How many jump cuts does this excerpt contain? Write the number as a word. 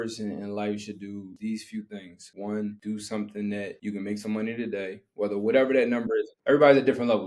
five